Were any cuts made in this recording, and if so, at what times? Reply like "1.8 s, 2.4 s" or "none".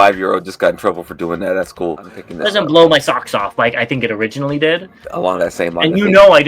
2.2 s, 5.0 s